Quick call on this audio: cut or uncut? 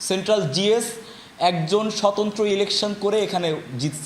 uncut